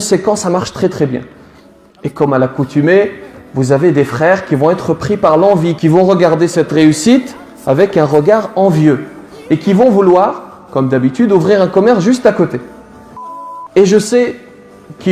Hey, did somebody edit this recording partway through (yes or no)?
yes